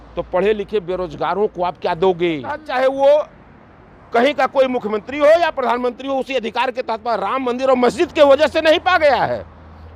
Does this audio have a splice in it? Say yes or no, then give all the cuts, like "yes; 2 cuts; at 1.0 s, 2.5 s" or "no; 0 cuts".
yes; 1 cut; at 2.6 s